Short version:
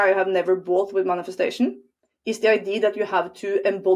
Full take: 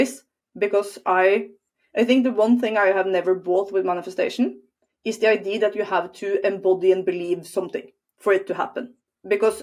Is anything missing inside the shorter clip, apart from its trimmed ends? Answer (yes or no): no